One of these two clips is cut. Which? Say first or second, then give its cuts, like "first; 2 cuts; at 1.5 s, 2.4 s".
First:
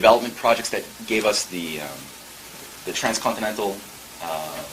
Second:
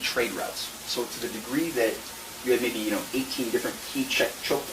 second; 1 cut; at 1.1 s